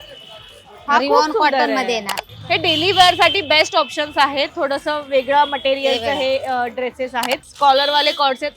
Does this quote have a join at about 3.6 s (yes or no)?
no